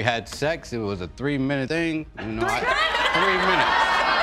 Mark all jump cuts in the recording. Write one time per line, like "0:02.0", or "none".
0:01.7